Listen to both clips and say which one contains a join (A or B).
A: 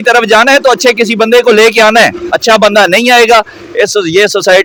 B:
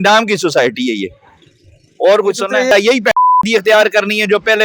B